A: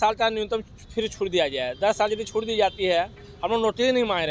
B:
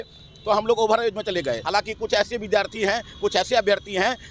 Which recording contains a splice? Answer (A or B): B